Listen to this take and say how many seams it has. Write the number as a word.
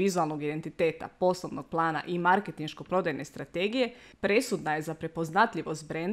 one